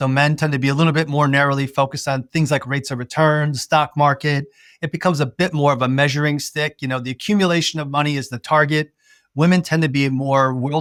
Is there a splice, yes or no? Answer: no